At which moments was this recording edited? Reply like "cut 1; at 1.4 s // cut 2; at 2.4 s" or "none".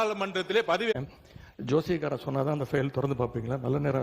cut 1; at 0.9 s